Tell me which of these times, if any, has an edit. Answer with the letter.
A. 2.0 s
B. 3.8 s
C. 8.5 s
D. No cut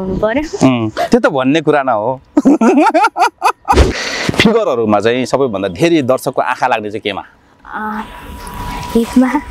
B